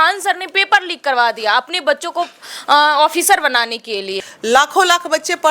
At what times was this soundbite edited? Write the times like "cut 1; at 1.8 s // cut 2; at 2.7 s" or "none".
cut 1; at 4.2 s